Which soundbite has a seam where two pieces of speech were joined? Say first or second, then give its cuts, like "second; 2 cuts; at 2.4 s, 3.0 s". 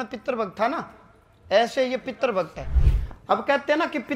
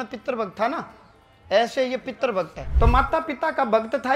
second; 1 cut; at 2.6 s